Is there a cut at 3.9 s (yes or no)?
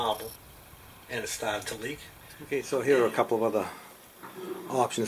no